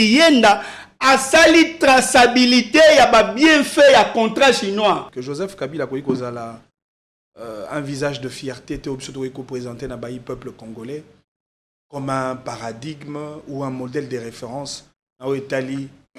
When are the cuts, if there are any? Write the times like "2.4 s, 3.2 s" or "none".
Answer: 5.0 s